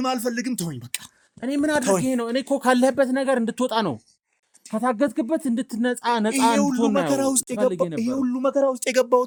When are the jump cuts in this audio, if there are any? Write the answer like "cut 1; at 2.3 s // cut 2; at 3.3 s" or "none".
none

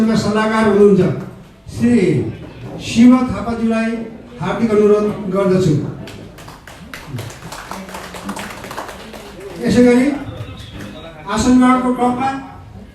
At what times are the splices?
cut 1; at 2.0 s

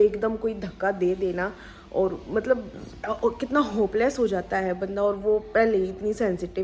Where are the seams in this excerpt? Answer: none

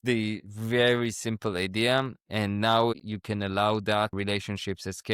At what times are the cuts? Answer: cut 1; at 3.0 s // cut 2; at 4.1 s

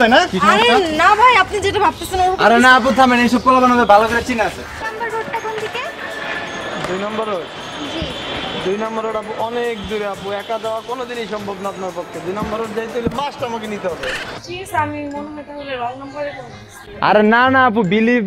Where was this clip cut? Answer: cut 1; at 4.7 s // cut 2; at 14.4 s

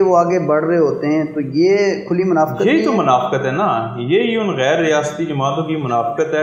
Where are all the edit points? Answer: none

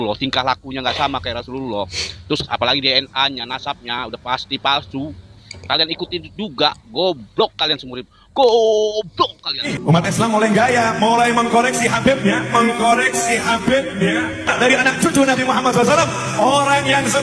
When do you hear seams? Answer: cut 1; at 9.7 s

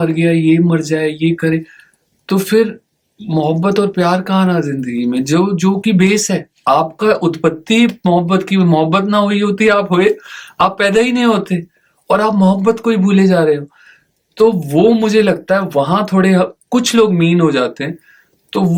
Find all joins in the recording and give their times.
none

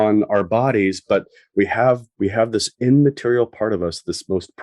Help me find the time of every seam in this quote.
none

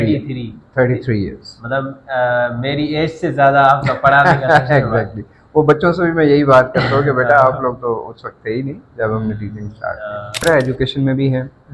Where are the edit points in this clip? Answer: cut 1; at 10.4 s

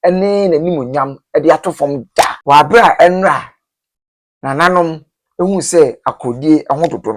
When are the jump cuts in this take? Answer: cut 1; at 2.4 s

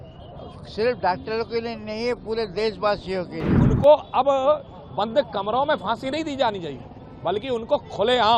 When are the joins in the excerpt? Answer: cut 1; at 3.5 s

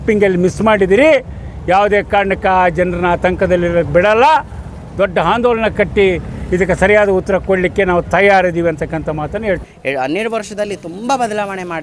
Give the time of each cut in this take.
cut 1; at 9.7 s

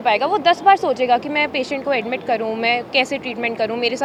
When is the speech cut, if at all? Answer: none

